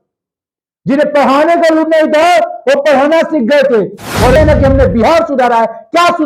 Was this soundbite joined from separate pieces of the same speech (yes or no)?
yes